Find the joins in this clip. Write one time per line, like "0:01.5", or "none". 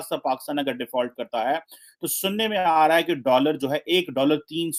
none